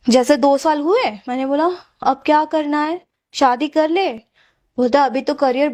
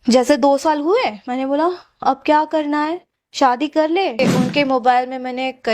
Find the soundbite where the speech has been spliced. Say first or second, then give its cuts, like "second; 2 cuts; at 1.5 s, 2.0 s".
second; 1 cut; at 4.2 s